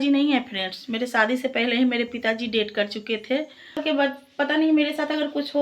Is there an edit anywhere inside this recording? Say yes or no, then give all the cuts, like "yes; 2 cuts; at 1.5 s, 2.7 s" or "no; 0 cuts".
yes; 1 cut; at 3.8 s